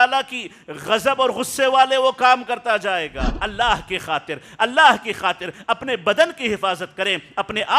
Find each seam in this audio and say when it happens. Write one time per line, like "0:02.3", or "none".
0:03.3